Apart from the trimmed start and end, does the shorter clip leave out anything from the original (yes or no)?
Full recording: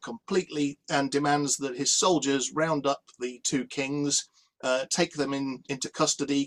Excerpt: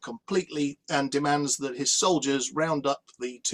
no